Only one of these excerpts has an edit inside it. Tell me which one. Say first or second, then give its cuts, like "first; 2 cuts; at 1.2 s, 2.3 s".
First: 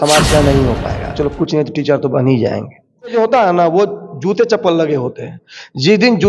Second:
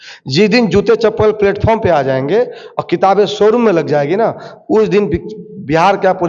first; 2 cuts; at 1.1 s, 3.1 s